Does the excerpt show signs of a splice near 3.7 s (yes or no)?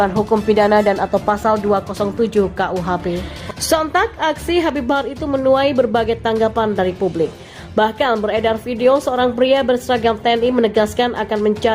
yes